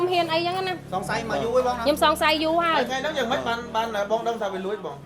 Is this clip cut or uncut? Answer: uncut